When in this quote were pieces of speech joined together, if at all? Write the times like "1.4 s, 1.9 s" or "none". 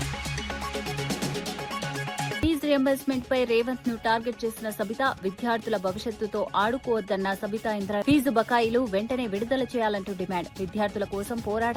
2.4 s